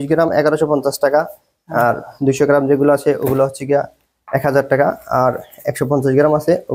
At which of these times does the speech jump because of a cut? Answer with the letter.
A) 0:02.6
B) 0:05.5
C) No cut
C